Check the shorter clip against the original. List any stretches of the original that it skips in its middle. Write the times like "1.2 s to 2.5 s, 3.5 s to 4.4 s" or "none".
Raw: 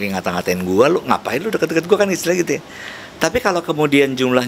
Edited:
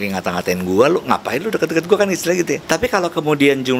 2.6 s to 3.1 s